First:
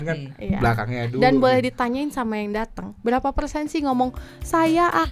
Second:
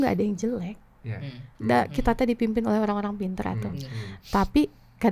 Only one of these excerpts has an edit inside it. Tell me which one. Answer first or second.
second